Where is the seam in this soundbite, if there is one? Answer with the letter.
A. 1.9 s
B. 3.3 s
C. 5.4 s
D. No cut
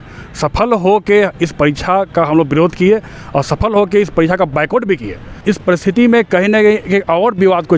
C